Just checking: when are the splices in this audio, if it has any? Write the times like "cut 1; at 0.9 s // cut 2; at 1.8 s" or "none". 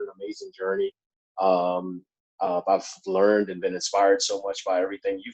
none